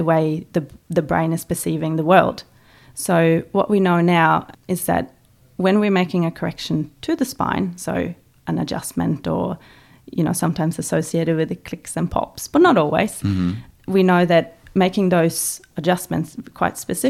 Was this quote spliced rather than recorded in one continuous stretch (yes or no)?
yes